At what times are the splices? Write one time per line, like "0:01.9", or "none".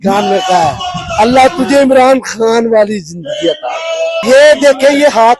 0:04.2